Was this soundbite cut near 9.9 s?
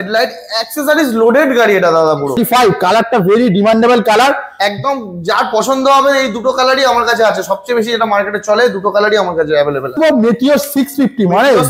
yes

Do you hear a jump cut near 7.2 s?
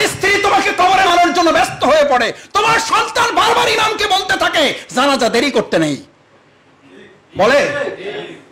no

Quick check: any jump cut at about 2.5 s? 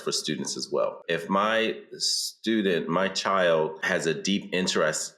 no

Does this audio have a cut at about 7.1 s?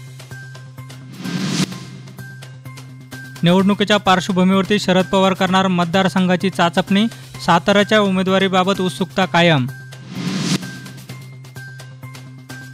no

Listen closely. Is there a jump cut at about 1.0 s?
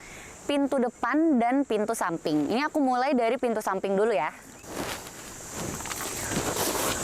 no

